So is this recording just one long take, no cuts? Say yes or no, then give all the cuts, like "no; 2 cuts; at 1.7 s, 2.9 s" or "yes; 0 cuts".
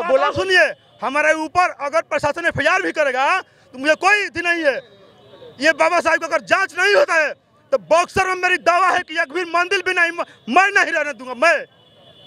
yes; 0 cuts